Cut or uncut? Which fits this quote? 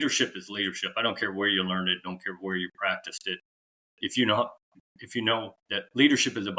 uncut